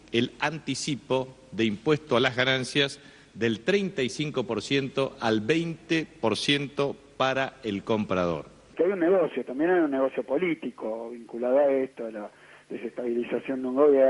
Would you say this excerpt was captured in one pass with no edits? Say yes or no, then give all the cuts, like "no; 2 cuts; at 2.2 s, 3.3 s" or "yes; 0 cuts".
no; 1 cut; at 8.7 s